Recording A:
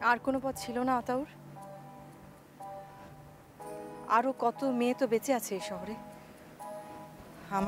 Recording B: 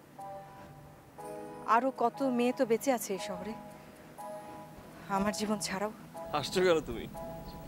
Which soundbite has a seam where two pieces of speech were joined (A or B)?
B